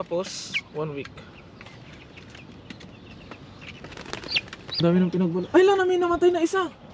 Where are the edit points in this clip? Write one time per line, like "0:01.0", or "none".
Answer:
0:04.4